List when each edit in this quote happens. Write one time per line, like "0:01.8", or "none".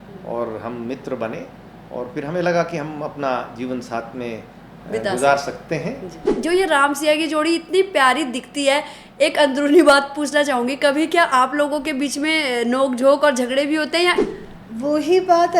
0:06.3
0:14.2